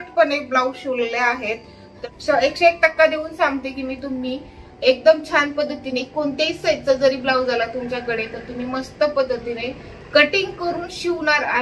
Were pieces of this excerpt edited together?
yes; 1 cut; at 2.0 s

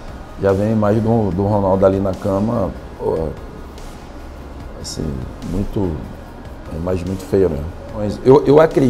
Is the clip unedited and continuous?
yes; 0 cuts

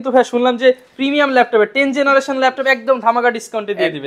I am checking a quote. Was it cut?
no; 0 cuts

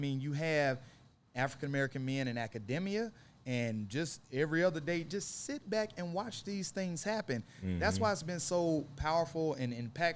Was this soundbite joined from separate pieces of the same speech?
no; 0 cuts

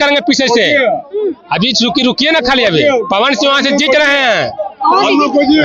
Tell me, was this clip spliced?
no; 0 cuts

